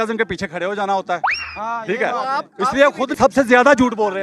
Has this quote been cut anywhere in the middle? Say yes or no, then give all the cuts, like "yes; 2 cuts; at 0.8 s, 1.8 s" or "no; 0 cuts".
yes; 1 cut; at 3.1 s